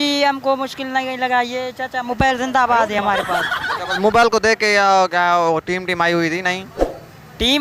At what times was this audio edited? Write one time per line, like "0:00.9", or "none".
none

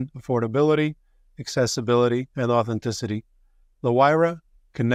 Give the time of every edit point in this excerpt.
none

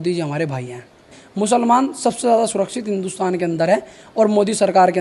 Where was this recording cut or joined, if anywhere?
0:01.2

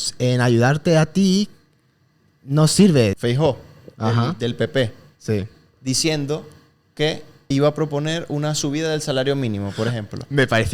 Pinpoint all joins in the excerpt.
0:03.2
0:07.5

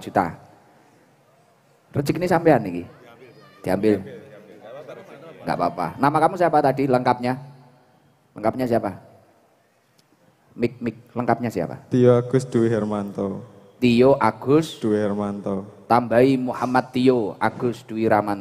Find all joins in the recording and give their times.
none

